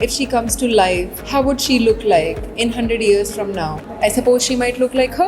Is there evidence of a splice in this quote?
yes; 2 cuts; at 1.2 s, 3.8 s

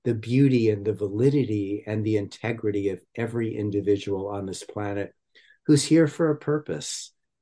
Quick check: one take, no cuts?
yes; 0 cuts

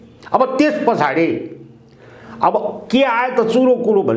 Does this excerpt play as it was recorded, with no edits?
yes; 0 cuts

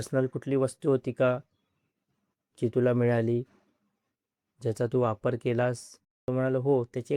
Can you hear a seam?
yes; 1 cut; at 6.2 s

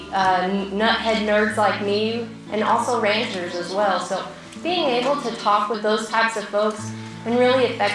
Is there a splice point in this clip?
yes; 2 cuts; at 2.3 s, 5.8 s

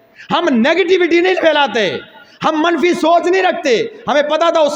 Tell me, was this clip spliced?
no; 0 cuts

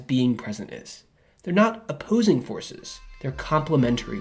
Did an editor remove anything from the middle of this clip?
no; 0 cuts

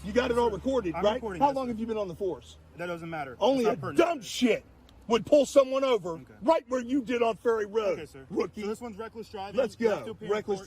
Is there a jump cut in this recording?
no; 0 cuts

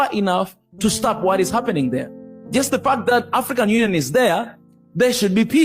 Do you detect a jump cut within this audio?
no; 0 cuts

